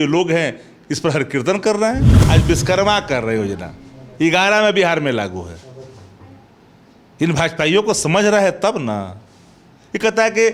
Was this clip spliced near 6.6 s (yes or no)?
no